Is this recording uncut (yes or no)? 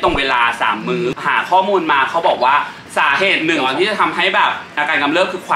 no